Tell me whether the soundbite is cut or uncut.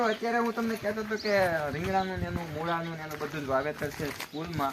uncut